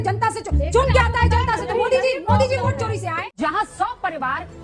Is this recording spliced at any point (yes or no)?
yes